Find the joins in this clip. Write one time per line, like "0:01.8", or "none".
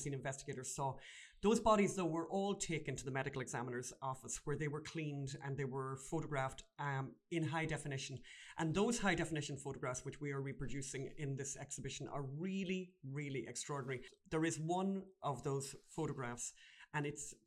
0:14.1